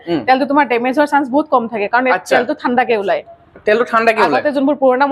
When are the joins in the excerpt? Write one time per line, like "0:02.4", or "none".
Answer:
none